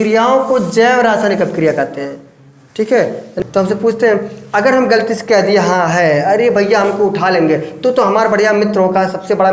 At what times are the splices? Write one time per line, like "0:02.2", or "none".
0:03.3